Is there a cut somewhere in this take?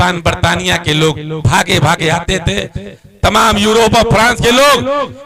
no; 0 cuts

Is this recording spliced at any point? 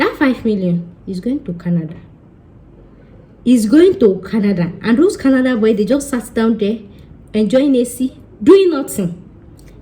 no; 0 cuts

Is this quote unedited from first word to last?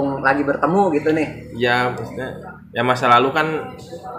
yes; 0 cuts

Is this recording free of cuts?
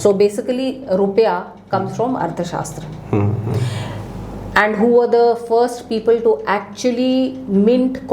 yes; 0 cuts

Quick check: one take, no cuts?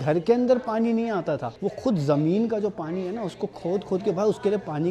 yes; 0 cuts

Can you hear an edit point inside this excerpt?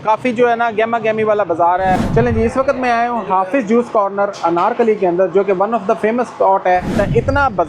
yes; 2 cuts; at 2.0 s, 6.9 s

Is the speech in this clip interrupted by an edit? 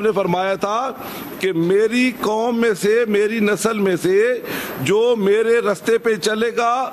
no; 0 cuts

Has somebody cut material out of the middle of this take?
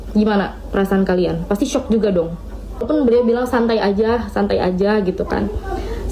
yes; 1 cut; at 2.9 s

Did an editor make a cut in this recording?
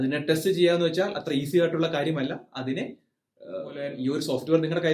yes; 1 cut; at 3.9 s

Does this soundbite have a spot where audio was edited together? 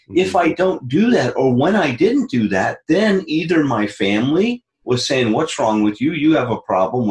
no; 0 cuts

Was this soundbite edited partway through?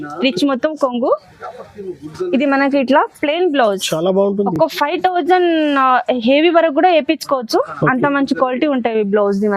no; 0 cuts

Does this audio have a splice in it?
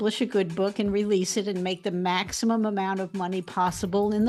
no; 0 cuts

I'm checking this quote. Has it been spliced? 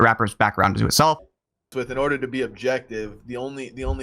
yes; 1 cut; at 1.6 s

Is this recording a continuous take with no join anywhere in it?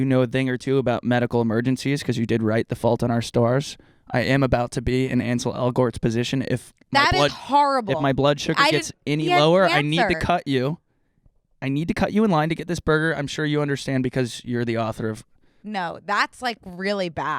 yes; 0 cuts

